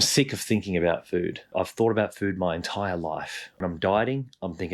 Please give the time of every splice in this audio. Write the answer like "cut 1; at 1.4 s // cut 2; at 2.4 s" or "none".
cut 1; at 1.5 s // cut 2; at 3.6 s